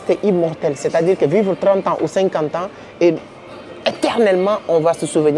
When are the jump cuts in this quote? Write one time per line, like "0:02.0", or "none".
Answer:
none